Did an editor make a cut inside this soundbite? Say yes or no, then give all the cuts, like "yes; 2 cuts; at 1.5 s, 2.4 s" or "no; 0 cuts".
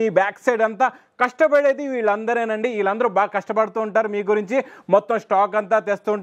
no; 0 cuts